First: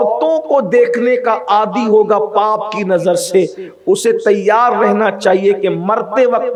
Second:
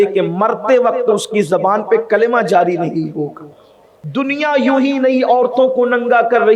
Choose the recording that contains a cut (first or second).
second